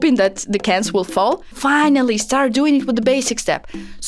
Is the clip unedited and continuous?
no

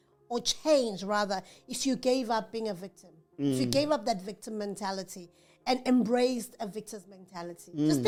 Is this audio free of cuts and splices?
yes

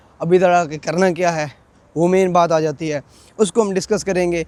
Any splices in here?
no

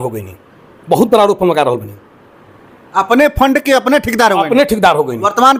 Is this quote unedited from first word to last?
yes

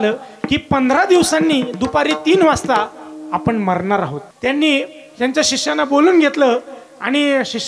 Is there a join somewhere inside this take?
yes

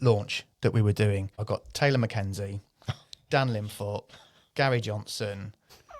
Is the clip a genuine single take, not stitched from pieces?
no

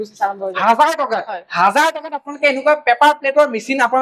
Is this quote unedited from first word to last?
yes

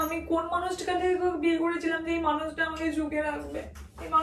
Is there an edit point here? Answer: no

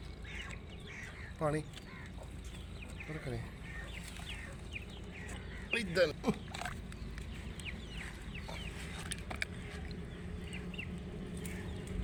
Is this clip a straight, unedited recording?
yes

